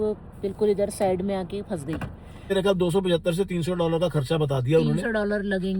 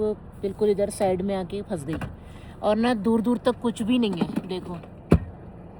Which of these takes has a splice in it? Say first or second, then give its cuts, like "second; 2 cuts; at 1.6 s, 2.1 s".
first; 1 cut; at 2.5 s